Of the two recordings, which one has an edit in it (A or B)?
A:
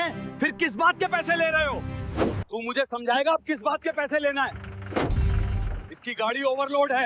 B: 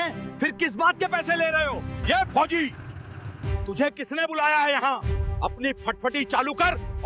B